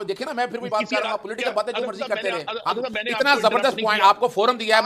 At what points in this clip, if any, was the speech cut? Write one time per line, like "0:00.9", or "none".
none